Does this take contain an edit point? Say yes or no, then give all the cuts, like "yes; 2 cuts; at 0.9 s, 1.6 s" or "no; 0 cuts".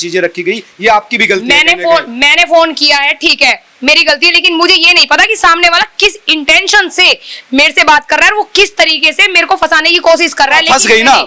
no; 0 cuts